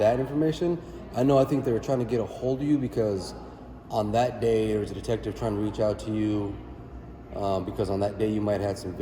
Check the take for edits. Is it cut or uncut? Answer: uncut